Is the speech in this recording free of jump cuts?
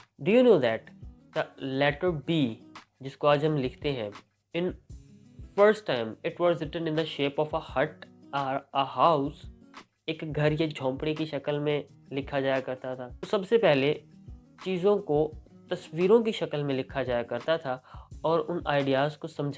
no; 1 cut; at 13.1 s

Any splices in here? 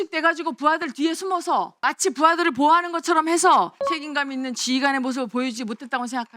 yes; 2 cuts; at 1.7 s, 3.8 s

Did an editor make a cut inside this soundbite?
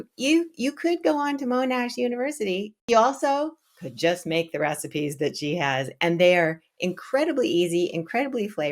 yes; 1 cut; at 2.8 s

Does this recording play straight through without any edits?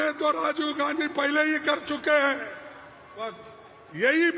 no; 1 cut; at 3.3 s

